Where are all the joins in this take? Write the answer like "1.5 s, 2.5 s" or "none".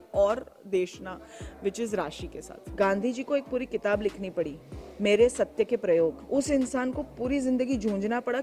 2.7 s